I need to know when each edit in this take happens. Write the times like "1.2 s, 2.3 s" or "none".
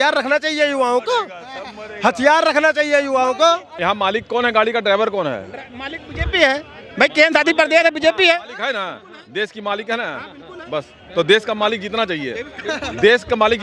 3.7 s

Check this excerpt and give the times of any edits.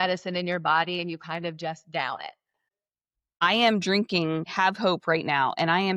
3.2 s, 4.5 s

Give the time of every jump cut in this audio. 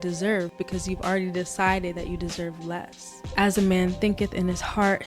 3.2 s

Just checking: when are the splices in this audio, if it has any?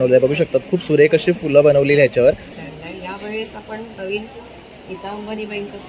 2.5 s

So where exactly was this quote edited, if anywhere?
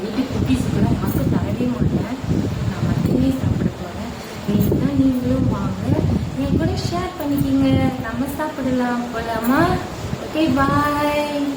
none

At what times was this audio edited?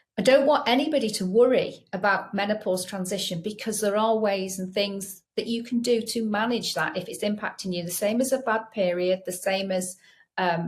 none

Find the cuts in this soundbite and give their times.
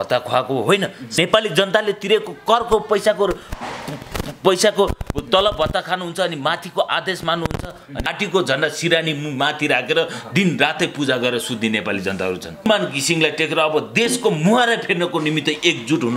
1.1 s, 8.1 s, 12.7 s

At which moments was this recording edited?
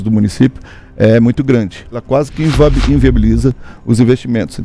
2.0 s

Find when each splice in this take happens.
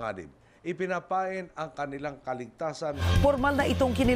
3.0 s

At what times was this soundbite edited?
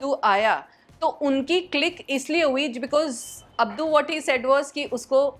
none

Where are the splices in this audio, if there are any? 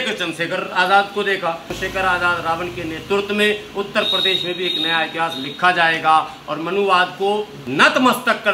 1.7 s, 7.6 s

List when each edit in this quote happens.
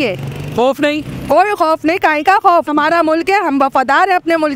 2.7 s

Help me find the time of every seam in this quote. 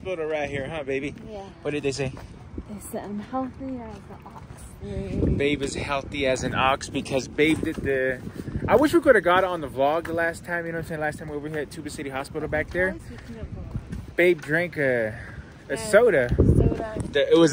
none

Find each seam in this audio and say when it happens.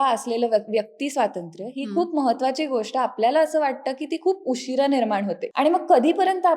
5.4 s

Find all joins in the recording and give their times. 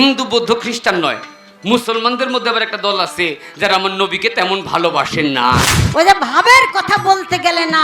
5.8 s

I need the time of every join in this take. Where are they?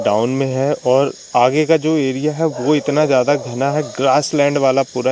none

